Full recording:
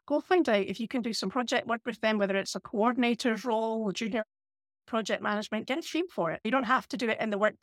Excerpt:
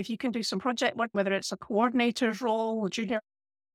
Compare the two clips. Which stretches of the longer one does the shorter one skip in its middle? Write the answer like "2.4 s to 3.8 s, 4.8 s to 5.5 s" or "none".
1.8 s to 2.2 s